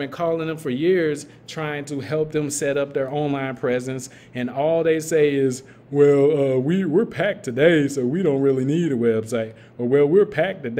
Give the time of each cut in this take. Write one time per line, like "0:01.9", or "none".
none

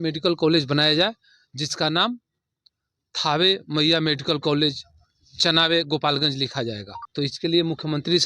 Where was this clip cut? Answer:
0:06.9

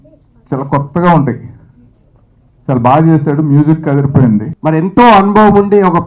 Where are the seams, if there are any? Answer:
0:04.5

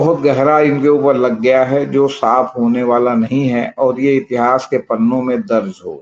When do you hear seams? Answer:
none

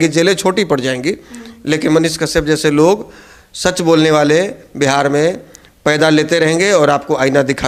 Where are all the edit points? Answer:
none

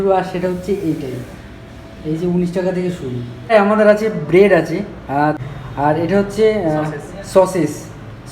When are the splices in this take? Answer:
0:03.5
0:05.3

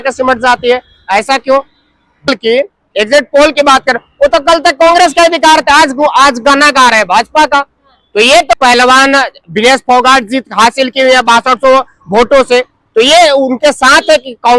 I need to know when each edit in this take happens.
0:02.3
0:08.6

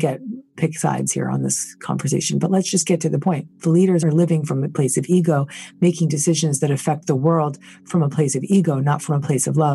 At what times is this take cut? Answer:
0:04.0

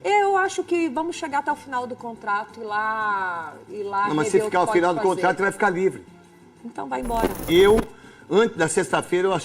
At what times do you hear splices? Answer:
0:07.4

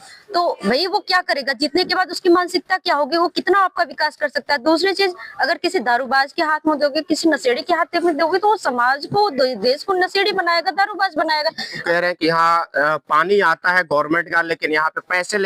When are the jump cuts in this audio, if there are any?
0:11.8

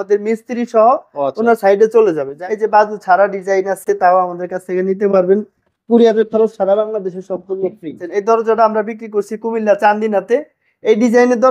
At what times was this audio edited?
0:02.3
0:08.0

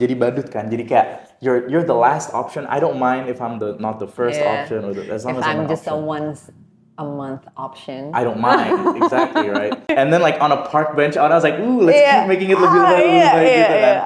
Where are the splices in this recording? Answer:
0:09.8

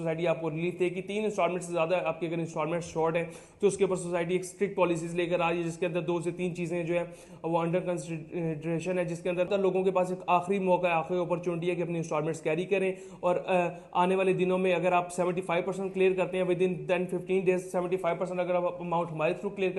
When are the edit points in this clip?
0:09.5

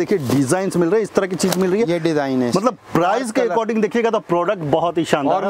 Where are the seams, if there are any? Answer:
none

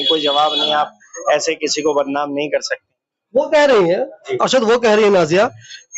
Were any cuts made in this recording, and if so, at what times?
none

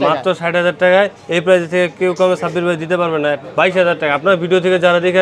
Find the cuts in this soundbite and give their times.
0:03.4

